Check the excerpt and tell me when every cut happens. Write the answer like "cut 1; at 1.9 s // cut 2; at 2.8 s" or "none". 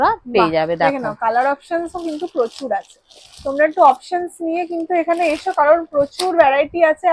none